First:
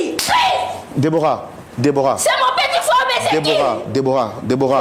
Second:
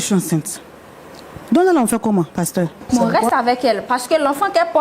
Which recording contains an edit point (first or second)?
second